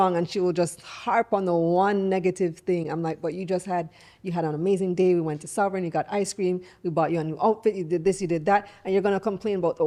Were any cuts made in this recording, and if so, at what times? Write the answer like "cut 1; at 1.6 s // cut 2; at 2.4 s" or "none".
none

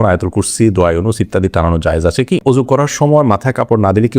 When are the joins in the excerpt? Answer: cut 1; at 2.4 s

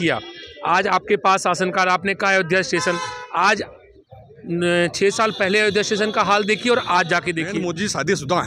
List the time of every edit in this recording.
cut 1; at 7.5 s

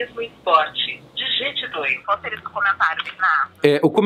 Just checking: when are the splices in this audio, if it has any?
cut 1; at 2.0 s

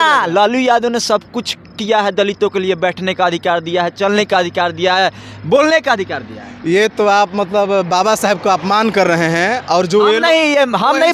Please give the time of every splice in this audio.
none

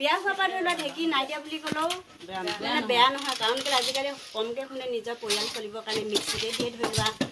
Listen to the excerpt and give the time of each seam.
none

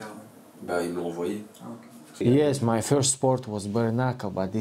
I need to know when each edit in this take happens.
cut 1; at 2.2 s

